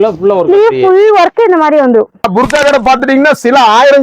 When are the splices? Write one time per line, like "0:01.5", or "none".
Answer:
0:02.3

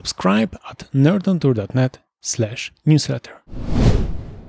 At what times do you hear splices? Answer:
0:03.4

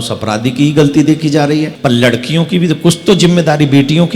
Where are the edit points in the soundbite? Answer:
0:01.7

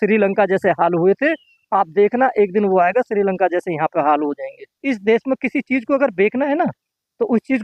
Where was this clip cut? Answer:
0:04.7

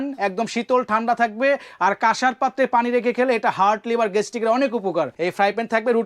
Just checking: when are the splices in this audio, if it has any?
0:05.1

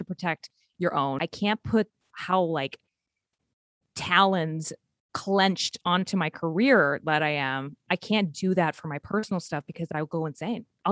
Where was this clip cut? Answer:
0:01.1

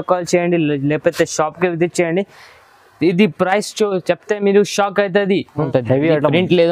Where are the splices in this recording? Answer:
0:05.6

